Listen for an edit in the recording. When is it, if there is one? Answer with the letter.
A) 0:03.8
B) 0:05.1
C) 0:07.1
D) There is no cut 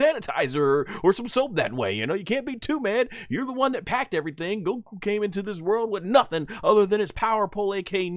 C